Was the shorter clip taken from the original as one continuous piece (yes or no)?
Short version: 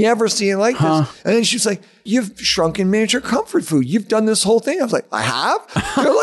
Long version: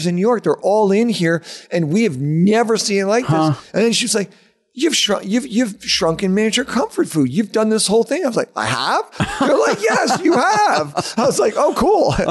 no